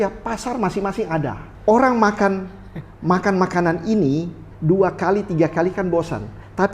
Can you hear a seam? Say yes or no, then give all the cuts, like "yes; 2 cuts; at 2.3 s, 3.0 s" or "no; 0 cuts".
yes; 1 cut; at 1.5 s